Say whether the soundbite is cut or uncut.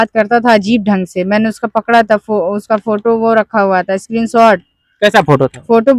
uncut